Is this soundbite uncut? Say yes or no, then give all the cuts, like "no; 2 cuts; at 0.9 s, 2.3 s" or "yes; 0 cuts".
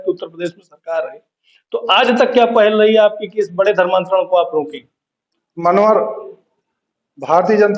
yes; 0 cuts